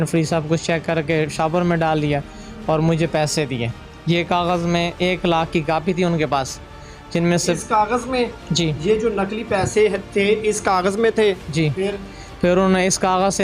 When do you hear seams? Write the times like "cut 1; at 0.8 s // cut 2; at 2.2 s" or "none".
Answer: none